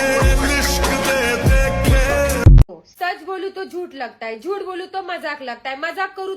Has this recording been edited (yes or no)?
yes